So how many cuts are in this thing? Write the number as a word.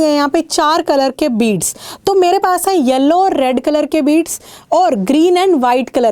zero